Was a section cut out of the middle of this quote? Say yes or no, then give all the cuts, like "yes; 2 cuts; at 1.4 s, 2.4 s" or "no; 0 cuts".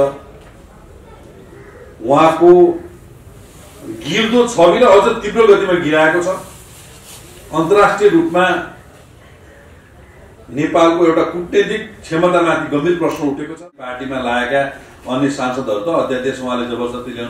yes; 1 cut; at 14.0 s